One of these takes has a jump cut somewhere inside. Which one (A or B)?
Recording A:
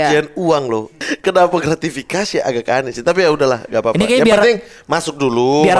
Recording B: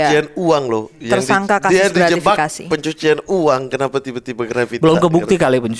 A